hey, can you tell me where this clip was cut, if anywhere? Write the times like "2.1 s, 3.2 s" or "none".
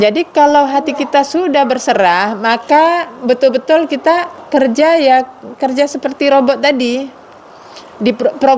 4.4 s